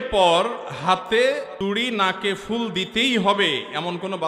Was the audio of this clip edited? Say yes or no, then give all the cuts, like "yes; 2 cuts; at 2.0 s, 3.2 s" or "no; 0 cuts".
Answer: no; 0 cuts